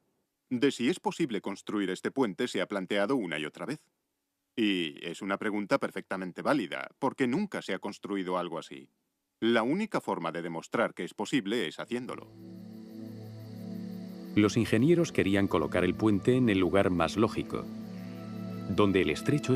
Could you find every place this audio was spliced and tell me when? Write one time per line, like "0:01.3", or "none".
none